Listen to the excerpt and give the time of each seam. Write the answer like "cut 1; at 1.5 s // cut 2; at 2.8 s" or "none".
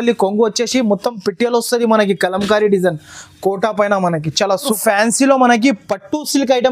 cut 1; at 4.7 s